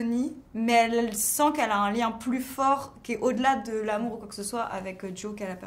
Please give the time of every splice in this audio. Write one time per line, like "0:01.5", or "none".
none